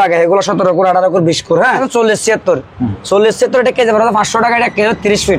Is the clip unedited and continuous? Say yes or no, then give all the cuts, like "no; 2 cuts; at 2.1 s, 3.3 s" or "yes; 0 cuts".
no; 1 cut; at 1.8 s